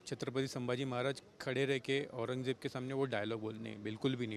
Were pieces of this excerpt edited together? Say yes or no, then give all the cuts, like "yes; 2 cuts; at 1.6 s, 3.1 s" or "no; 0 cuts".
no; 0 cuts